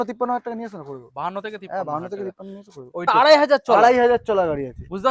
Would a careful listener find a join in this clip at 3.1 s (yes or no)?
yes